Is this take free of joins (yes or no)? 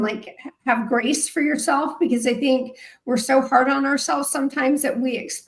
yes